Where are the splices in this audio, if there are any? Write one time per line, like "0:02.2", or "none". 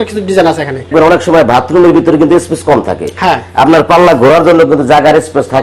0:00.9